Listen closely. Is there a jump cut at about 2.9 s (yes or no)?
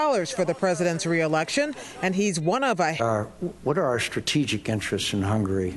no